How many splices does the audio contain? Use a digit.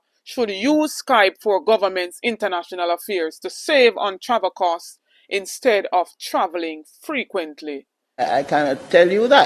1